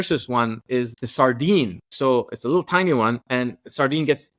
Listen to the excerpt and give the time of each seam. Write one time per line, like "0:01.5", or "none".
0:01.0
0:01.9